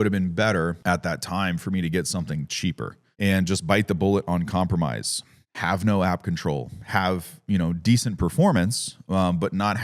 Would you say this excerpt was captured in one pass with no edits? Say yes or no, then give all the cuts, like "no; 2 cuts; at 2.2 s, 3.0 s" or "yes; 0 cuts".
no; 2 cuts; at 0.8 s, 3.0 s